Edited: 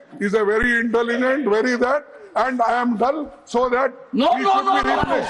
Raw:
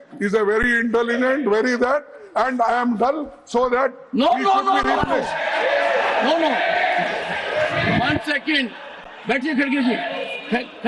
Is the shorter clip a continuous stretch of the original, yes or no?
yes